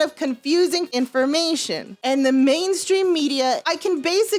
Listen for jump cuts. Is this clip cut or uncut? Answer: cut